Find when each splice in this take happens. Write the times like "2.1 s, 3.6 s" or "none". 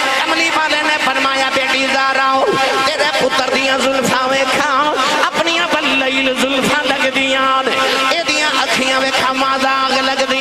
none